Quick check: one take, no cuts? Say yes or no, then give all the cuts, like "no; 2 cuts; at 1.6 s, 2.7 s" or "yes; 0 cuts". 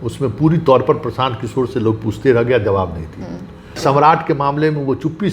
no; 1 cut; at 3.8 s